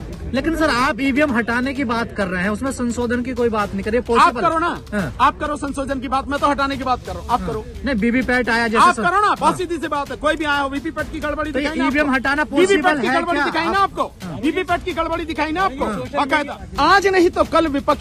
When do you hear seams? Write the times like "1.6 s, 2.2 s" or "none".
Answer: 16.6 s